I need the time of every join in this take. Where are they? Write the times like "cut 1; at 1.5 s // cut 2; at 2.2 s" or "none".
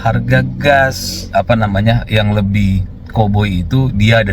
cut 1; at 1.1 s